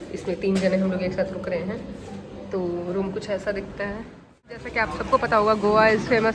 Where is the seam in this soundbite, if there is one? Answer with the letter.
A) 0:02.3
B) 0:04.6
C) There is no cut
B